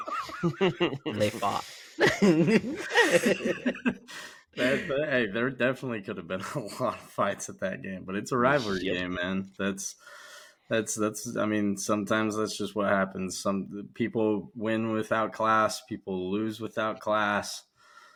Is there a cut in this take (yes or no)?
no